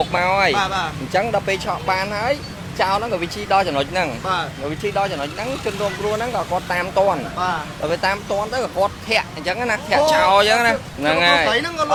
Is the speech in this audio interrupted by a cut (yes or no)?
no